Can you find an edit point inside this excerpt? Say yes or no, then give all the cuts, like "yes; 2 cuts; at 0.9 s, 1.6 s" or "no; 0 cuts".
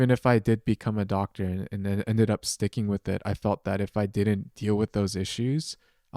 no; 0 cuts